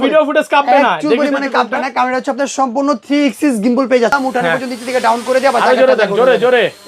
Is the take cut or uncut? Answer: cut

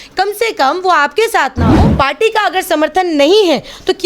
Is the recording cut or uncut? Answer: cut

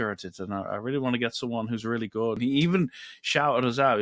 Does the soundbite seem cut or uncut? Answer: cut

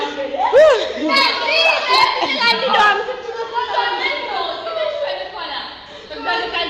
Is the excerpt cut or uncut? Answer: uncut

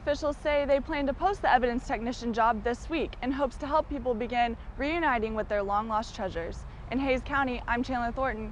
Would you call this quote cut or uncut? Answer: uncut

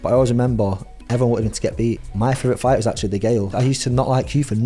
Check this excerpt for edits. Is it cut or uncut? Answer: cut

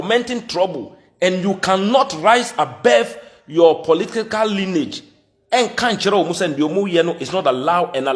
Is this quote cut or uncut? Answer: uncut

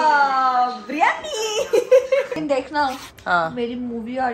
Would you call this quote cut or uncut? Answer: cut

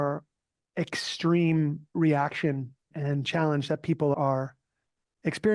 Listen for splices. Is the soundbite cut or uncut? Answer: cut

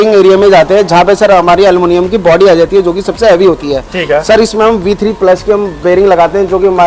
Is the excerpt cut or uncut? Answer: uncut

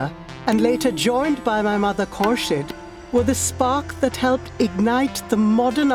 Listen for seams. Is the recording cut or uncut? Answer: uncut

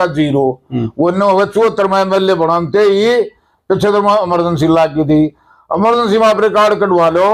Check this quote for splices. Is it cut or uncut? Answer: uncut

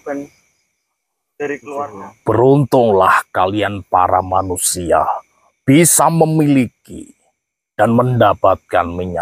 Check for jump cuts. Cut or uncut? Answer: cut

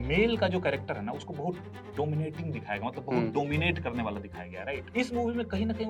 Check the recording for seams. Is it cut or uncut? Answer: cut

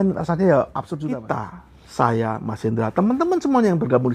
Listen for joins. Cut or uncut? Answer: cut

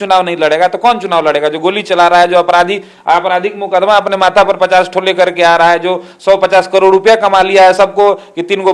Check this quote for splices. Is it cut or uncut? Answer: uncut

